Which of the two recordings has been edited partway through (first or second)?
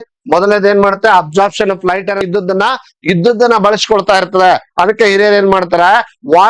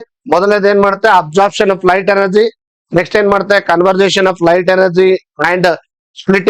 first